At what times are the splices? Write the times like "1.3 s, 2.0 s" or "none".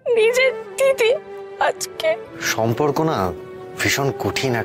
2.4 s